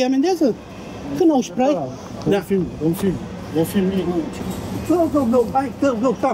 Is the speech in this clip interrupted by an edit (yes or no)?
yes